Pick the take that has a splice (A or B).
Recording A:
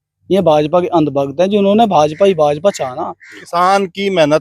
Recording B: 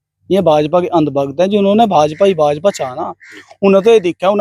A